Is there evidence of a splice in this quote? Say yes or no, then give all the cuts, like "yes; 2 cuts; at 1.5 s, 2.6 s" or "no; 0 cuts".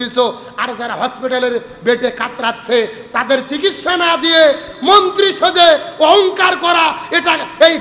no; 0 cuts